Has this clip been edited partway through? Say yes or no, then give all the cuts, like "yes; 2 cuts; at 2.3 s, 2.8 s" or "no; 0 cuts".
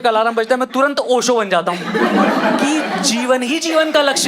no; 0 cuts